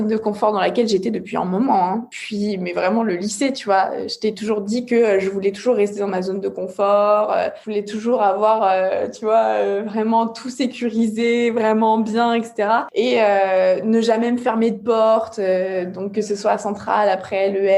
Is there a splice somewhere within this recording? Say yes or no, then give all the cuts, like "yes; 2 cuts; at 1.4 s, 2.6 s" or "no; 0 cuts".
yes; 3 cuts; at 2.1 s, 7.6 s, 12.9 s